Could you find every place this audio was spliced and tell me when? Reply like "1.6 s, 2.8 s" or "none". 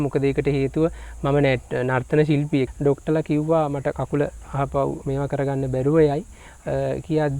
2.7 s